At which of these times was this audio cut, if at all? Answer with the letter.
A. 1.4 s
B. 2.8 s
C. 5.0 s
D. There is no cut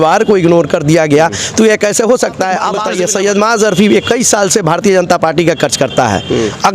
B